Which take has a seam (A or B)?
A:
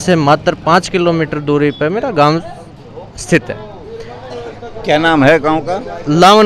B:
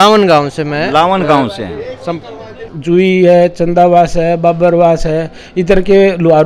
B